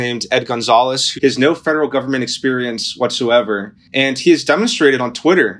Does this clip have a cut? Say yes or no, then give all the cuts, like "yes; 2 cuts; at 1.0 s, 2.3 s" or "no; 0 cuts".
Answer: yes; 2 cuts; at 1.1 s, 3.8 s